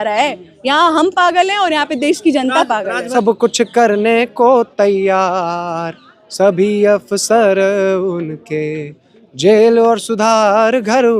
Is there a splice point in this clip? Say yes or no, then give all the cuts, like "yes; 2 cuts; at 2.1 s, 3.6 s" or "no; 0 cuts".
yes; 1 cut; at 3.0 s